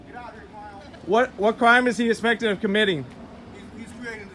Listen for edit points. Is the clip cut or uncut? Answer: cut